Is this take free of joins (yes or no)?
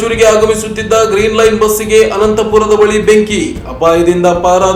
yes